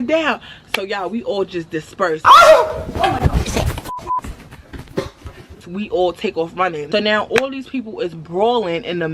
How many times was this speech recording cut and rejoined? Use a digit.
1